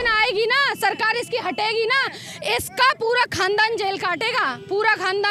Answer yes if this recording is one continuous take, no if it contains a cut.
yes